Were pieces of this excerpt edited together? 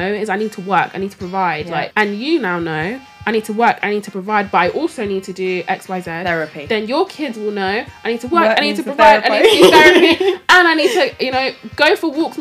yes; 1 cut; at 1.9 s

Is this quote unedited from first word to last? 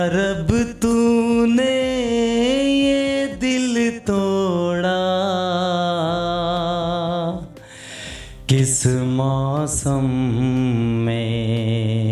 yes; 0 cuts

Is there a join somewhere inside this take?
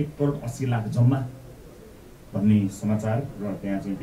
no; 0 cuts

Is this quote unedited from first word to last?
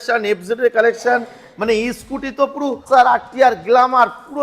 no; 1 cut; at 2.8 s

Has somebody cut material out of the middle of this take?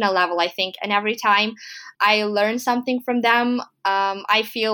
yes; 1 cut; at 1.8 s

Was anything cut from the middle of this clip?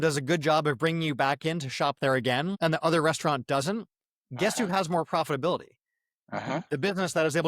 no; 0 cuts

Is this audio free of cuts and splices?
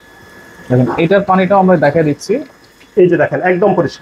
yes; 0 cuts

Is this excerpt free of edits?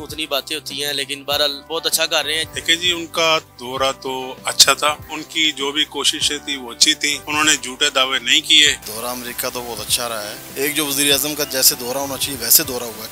no; 6 cuts; at 1.6 s, 2.4 s, 5.0 s, 7.2 s, 8.8 s, 10.4 s

